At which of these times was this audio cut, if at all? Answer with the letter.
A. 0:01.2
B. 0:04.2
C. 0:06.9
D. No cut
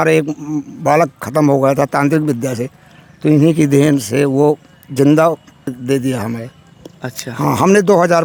D